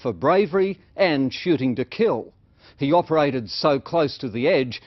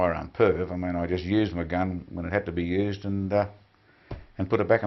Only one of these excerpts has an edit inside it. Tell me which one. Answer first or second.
first